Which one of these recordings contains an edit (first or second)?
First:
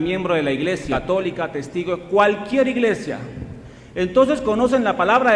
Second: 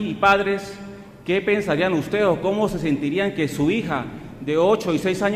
first